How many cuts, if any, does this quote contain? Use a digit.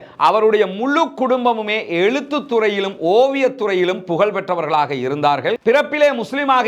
1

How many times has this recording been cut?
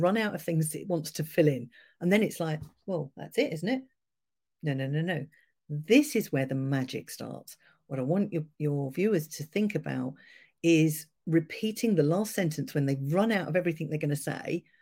0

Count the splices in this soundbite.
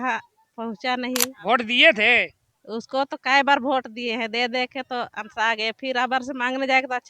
1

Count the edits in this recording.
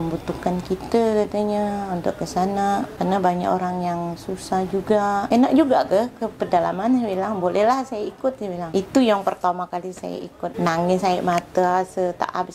4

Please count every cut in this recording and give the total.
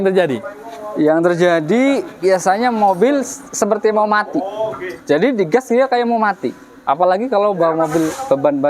0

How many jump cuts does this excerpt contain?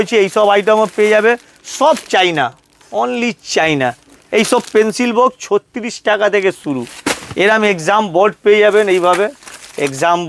0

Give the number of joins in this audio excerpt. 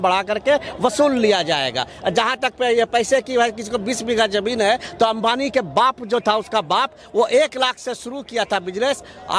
0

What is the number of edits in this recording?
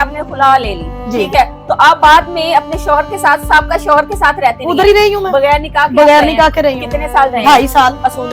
0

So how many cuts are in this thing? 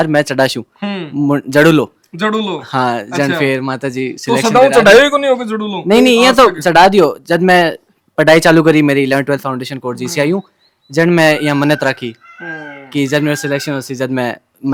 0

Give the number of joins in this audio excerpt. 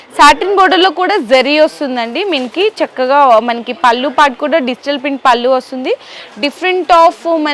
0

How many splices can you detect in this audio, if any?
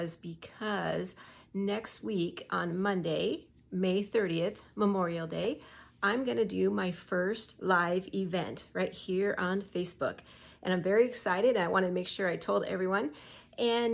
0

